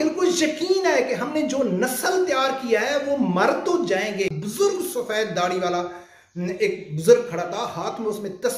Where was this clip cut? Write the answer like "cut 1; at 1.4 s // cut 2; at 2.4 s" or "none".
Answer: cut 1; at 4.3 s